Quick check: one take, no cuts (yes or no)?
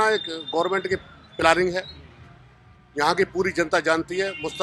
yes